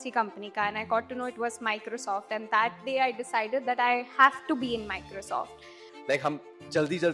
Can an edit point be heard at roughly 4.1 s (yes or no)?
no